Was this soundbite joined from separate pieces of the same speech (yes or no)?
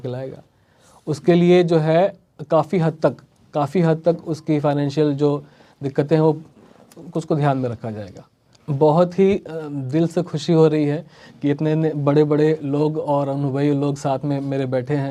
no